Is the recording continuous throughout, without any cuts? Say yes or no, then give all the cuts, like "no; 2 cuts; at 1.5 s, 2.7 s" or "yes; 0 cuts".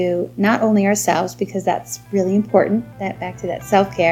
yes; 0 cuts